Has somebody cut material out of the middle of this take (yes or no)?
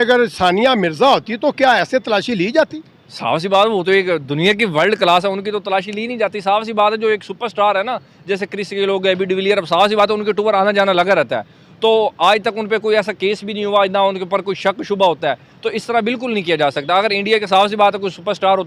no